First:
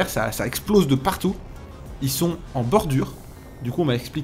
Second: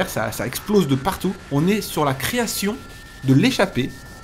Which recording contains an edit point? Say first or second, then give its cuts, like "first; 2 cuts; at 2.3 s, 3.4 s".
second; 1 cut; at 1.4 s